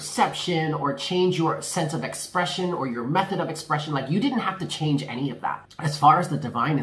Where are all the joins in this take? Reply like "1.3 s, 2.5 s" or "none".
5.7 s